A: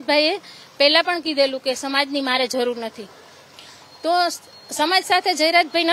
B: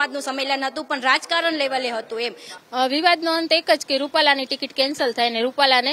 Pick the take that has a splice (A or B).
B